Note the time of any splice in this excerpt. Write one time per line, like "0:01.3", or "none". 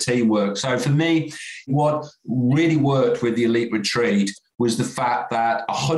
0:01.7